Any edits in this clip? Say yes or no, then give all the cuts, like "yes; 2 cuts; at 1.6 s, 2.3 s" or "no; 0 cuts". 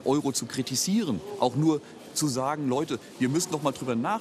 no; 0 cuts